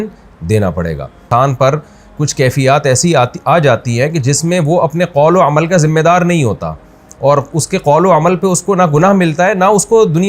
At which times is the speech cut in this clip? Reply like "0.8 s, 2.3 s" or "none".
1.2 s